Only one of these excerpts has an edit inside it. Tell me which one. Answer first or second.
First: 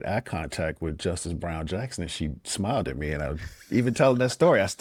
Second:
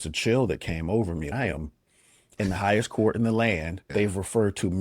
second